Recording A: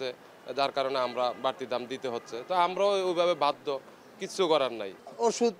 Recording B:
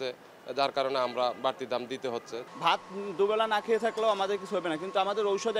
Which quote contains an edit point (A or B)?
B